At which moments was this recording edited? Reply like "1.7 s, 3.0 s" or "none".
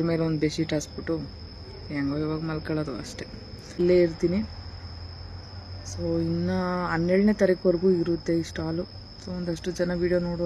3.8 s